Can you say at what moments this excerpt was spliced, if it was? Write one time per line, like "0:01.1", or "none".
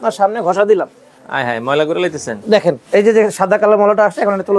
0:02.8